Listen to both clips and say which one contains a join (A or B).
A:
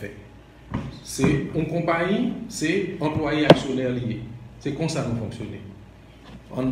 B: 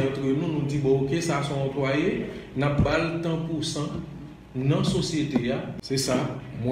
B